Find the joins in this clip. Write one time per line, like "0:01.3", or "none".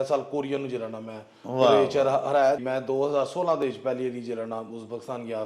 0:02.6

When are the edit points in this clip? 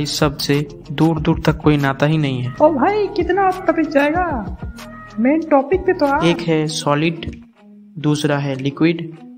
0:02.4
0:06.4

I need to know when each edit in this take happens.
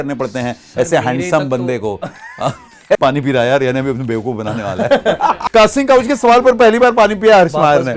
0:03.0
0:05.4

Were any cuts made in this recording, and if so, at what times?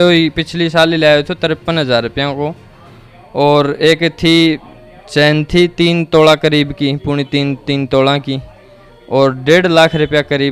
none

